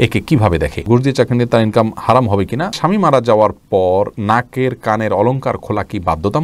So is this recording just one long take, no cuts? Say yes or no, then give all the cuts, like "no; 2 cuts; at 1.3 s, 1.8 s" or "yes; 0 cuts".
no; 3 cuts; at 0.8 s, 2.8 s, 4.1 s